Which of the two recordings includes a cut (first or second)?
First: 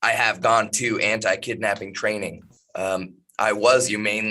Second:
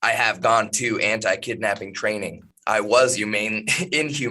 second